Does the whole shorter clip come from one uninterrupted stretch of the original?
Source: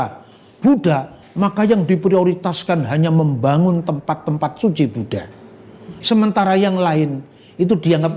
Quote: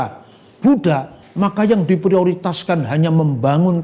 yes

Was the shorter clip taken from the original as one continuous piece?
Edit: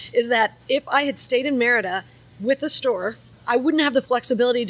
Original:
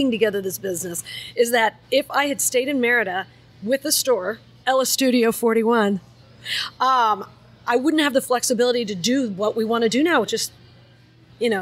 no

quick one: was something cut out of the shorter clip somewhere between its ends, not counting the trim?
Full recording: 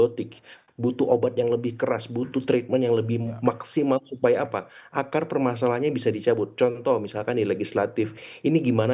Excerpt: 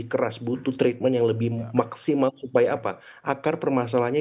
no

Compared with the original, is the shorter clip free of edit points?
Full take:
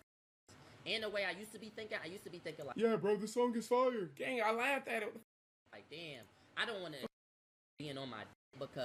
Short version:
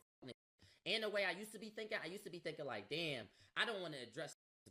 no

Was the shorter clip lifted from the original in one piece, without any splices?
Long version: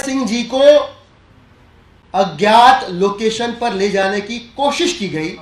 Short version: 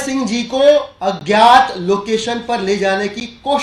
no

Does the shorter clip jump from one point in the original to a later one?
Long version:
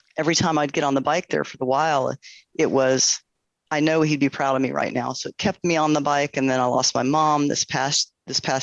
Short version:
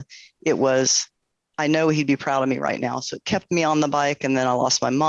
no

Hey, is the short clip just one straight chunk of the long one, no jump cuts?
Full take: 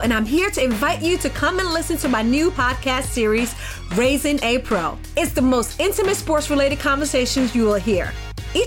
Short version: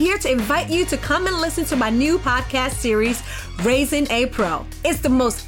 yes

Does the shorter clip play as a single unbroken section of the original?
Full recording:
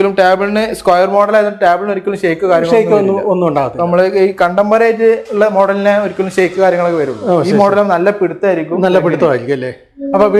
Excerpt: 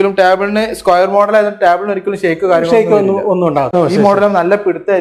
no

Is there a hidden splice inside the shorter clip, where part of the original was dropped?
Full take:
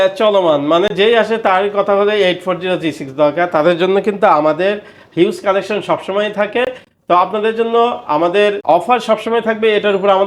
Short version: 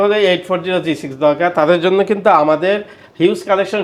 no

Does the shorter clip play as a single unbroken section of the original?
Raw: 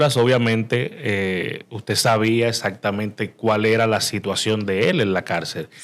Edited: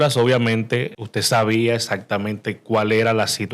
no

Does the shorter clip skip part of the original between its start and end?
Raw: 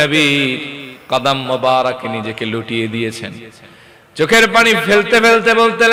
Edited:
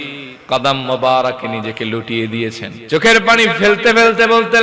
yes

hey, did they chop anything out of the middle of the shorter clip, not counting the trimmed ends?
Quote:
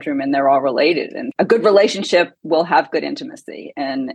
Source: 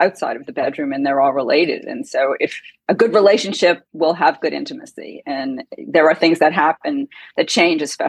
yes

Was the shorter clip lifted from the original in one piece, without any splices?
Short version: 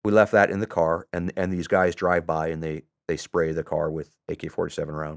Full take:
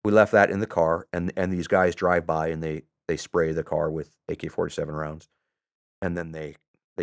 yes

